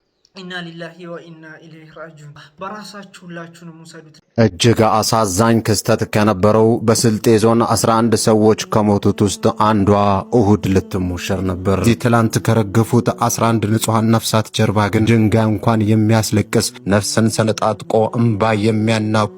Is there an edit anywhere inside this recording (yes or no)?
yes